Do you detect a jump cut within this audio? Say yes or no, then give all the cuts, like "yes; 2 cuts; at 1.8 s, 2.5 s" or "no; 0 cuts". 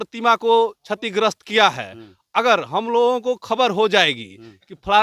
no; 0 cuts